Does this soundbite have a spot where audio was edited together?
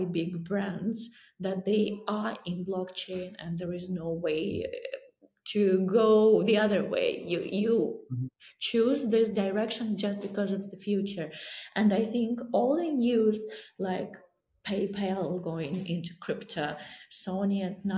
no; 0 cuts

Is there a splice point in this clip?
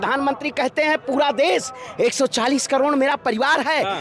no; 0 cuts

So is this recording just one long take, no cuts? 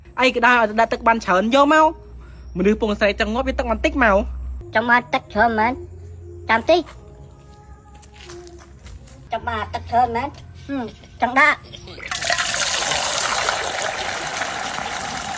yes; 0 cuts

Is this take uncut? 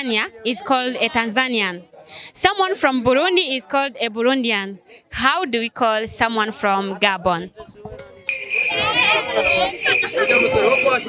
yes; 0 cuts

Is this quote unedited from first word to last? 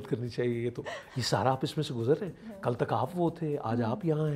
yes; 0 cuts

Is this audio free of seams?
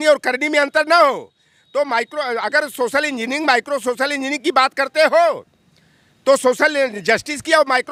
yes; 0 cuts

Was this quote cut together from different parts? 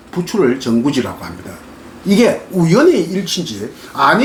no; 0 cuts

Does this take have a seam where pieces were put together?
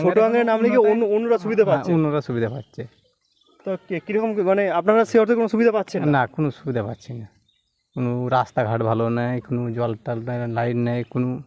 no; 0 cuts

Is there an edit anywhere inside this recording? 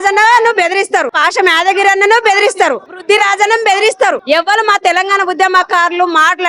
yes; 3 cuts; at 1.2 s, 3.0 s, 4.2 s

